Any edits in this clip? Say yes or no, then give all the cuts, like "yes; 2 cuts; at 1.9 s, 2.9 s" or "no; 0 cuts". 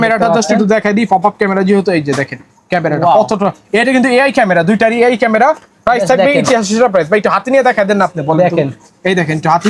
no; 0 cuts